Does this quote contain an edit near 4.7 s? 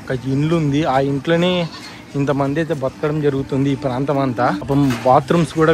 yes; 1 cut; at 4.7 s

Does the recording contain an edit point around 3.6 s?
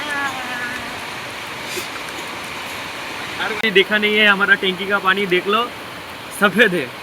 yes; 1 cut; at 3.6 s

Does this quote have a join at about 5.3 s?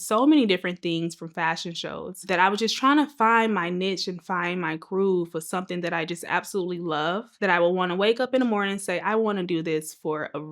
no; 2 cuts; at 2.2 s, 7.3 s

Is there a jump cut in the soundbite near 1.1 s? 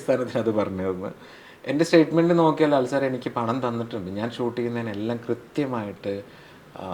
no; 0 cuts

